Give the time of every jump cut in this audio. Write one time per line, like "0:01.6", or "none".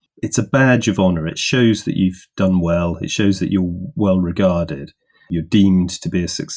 0:05.3